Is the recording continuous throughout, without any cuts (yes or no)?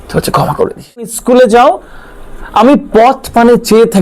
no